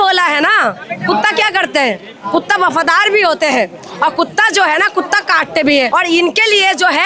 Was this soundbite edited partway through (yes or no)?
yes